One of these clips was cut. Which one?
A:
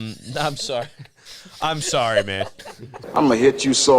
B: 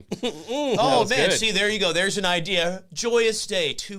A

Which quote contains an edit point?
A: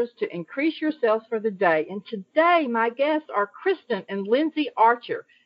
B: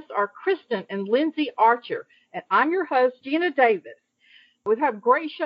B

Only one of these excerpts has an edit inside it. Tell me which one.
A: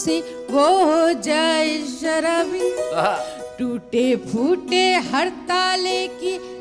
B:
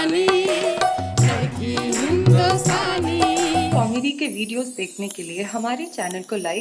B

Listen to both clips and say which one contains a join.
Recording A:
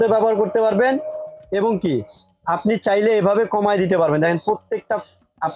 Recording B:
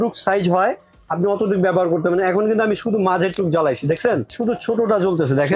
B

